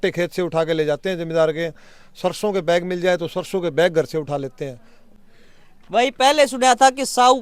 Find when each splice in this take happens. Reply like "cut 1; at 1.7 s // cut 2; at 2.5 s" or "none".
none